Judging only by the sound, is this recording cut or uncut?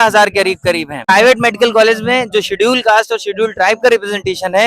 cut